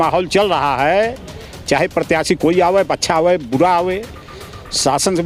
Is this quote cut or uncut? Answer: uncut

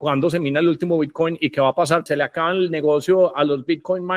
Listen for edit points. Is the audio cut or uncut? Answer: cut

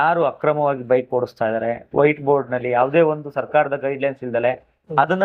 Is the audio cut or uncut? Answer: uncut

